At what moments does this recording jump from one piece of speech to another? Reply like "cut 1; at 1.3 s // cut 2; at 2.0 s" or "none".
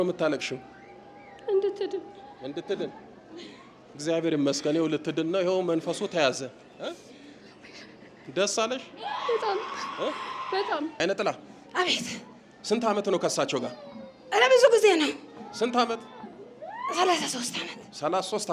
cut 1; at 10.9 s